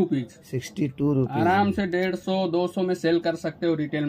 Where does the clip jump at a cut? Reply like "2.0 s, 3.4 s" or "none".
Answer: none